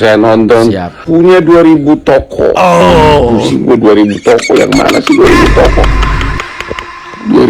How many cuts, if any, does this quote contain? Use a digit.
1